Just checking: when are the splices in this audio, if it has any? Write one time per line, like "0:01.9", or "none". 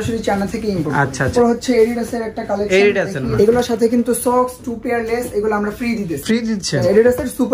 0:01.3
0:03.2
0:06.7